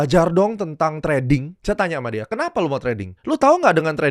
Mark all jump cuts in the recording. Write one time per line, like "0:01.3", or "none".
0:01.5
0:03.1